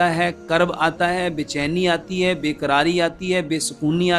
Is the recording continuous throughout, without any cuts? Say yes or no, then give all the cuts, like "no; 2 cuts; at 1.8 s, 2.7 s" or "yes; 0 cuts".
yes; 0 cuts